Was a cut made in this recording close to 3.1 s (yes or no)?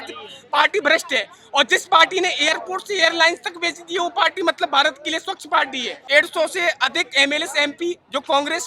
no